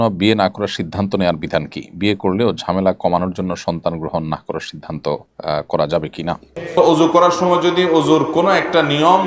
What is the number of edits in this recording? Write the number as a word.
two